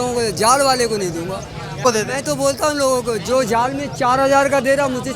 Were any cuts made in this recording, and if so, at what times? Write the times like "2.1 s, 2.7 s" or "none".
1.8 s